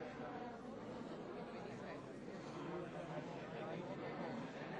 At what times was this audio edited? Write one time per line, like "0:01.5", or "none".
none